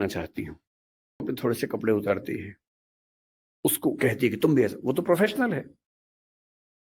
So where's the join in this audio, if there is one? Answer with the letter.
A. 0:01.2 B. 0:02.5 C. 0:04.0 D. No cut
A